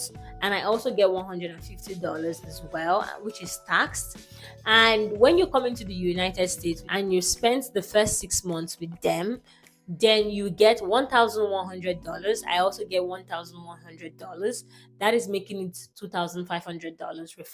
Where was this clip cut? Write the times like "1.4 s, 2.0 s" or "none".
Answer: 6.8 s